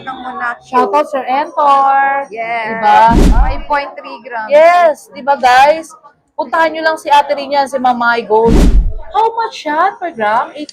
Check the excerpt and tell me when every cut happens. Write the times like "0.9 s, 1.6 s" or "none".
3.4 s, 8.8 s